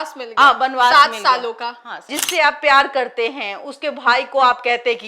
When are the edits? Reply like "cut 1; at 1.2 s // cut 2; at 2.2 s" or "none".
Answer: cut 1; at 2.2 s